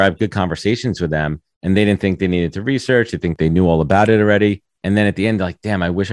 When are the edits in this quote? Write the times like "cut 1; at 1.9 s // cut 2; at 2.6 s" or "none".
cut 1; at 3.3 s // cut 2; at 4.7 s